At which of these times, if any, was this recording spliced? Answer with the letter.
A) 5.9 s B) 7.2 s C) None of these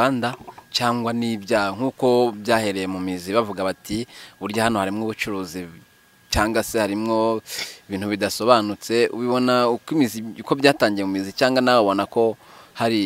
C